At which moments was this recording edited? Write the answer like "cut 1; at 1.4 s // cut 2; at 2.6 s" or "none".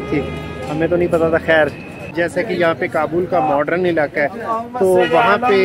cut 1; at 2.0 s